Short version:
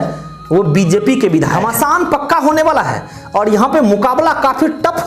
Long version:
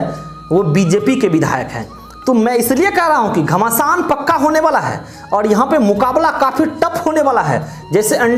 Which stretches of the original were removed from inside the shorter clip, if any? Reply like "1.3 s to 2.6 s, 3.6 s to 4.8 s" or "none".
1.6 s to 3.6 s